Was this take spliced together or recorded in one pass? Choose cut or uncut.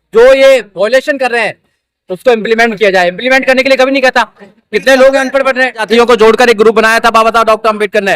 cut